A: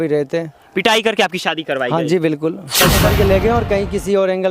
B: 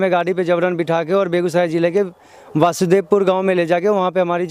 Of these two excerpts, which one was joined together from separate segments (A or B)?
A